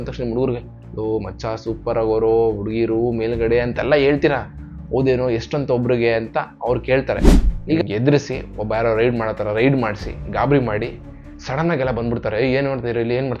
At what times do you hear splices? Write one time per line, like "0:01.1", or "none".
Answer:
0:07.4